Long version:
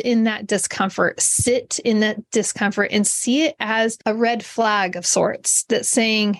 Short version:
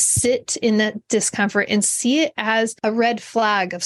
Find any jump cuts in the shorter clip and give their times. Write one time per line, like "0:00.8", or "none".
none